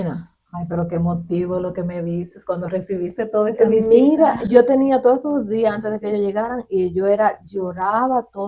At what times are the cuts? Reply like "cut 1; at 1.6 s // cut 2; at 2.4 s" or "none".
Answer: none